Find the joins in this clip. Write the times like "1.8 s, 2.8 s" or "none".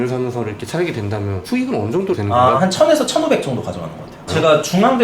2.6 s, 4.3 s